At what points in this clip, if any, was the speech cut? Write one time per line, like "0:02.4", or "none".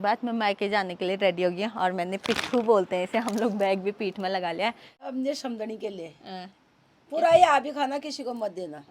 0:05.0